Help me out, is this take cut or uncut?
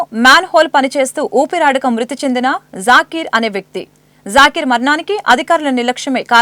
uncut